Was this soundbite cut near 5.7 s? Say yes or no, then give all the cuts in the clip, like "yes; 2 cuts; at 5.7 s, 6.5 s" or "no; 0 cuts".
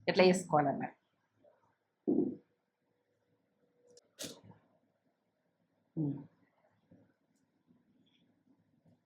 no; 1 cut; at 3.8 s